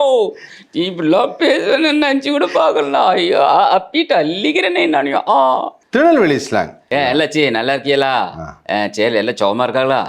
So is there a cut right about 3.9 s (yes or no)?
no